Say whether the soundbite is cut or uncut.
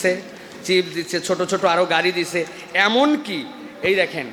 uncut